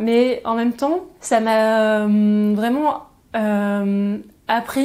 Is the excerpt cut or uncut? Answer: cut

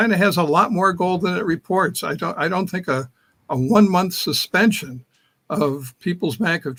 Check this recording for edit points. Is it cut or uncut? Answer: uncut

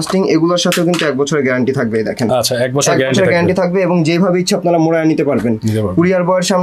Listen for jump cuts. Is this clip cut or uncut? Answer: uncut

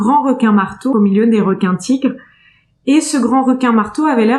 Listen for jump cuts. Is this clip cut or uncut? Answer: cut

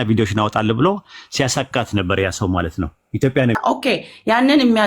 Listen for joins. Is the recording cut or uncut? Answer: cut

